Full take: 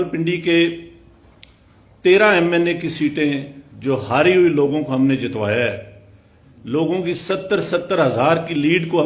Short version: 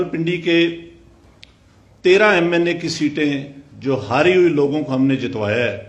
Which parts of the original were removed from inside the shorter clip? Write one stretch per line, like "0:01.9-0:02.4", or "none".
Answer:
none